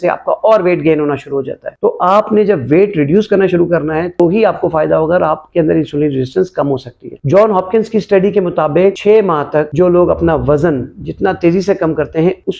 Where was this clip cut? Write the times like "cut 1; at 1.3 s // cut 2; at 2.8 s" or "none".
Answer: none